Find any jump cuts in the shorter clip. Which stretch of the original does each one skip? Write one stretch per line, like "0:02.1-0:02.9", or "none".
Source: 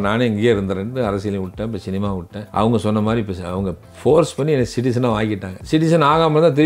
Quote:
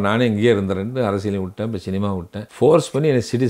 0:02.4-0:03.8